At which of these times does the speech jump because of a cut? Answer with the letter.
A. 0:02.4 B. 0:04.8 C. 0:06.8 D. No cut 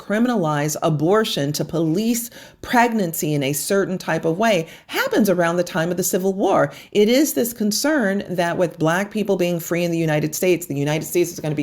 D